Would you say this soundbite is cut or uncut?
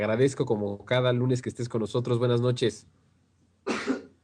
cut